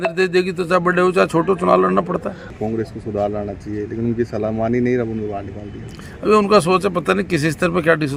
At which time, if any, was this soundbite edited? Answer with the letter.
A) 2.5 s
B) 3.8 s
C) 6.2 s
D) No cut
A